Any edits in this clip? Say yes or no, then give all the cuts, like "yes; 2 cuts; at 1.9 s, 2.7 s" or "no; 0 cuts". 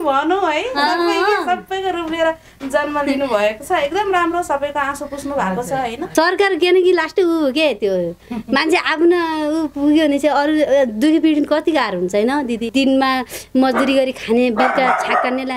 yes; 2 cuts; at 6.0 s, 12.7 s